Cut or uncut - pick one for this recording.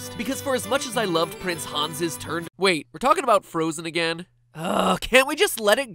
uncut